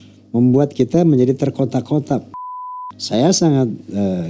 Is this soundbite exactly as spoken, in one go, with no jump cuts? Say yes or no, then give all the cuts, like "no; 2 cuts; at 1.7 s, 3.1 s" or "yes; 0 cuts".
no; 1 cut; at 2.6 s